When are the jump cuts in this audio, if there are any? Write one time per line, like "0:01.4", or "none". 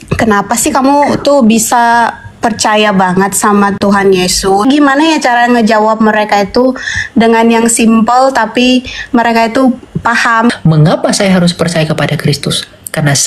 0:04.6
0:10.5